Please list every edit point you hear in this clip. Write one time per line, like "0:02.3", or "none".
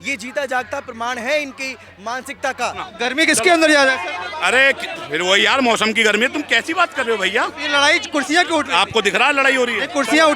0:02.8